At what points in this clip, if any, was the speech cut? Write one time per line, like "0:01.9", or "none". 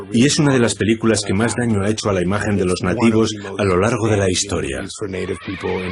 none